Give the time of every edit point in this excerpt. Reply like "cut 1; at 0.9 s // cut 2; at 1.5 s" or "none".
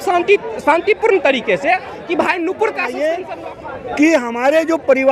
cut 1; at 3.2 s